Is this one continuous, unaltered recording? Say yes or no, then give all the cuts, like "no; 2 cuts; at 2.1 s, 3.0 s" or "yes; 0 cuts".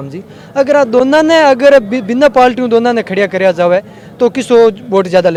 yes; 0 cuts